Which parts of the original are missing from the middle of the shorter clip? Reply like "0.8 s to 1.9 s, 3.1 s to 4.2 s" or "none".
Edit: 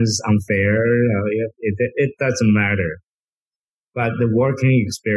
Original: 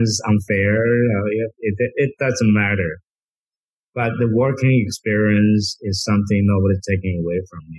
none